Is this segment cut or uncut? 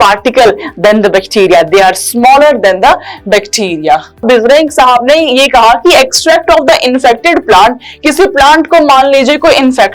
cut